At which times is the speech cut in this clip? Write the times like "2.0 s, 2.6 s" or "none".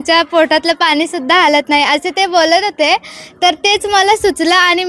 none